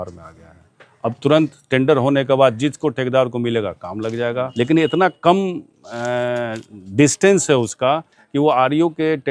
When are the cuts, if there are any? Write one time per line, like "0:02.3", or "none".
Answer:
0:04.5